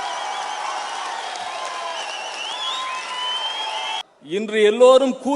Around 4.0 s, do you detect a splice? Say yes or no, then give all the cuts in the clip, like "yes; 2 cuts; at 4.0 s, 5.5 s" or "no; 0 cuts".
yes; 1 cut; at 4.0 s